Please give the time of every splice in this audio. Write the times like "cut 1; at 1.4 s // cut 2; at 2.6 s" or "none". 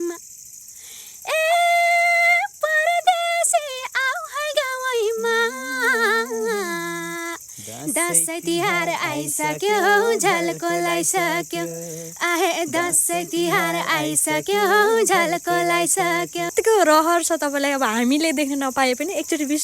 cut 1; at 16.5 s